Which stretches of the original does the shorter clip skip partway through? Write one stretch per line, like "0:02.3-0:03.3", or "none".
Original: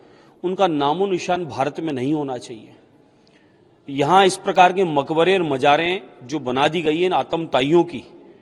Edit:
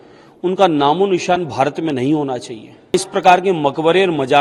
0:02.9-0:04.3